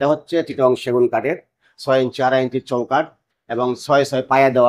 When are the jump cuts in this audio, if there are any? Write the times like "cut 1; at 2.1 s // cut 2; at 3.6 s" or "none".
none